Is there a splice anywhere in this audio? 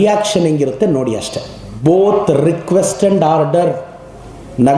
yes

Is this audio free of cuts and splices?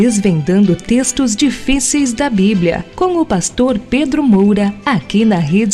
no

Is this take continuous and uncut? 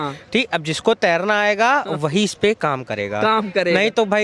yes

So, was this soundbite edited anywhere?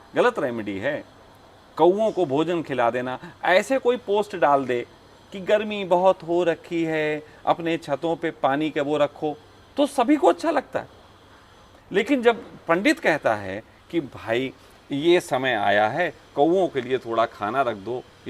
no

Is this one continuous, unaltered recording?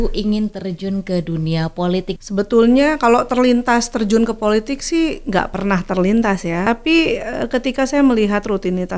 no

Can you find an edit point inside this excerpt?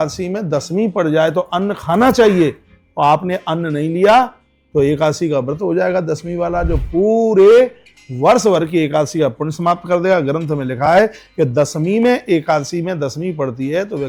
no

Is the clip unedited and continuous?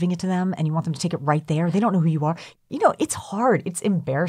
no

